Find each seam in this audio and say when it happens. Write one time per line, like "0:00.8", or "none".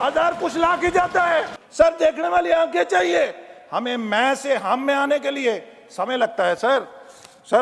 0:01.6